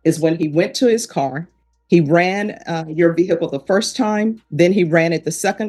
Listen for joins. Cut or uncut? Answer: uncut